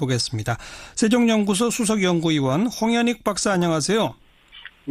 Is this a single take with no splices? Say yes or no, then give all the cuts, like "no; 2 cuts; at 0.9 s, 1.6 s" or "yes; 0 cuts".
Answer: yes; 0 cuts